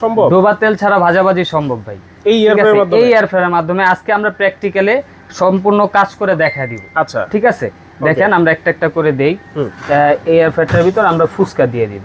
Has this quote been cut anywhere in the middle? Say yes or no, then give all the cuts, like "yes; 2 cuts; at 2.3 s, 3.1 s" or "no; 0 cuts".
no; 0 cuts